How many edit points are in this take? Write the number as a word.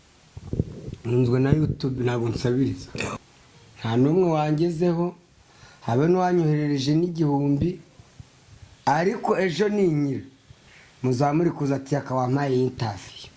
one